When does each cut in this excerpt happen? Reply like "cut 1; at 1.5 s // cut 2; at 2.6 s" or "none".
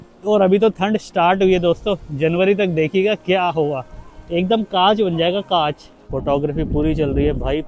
cut 1; at 5.9 s